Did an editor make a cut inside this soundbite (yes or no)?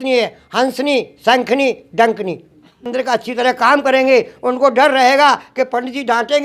yes